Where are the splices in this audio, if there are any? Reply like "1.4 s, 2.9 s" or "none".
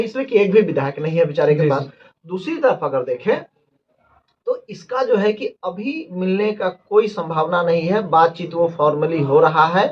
none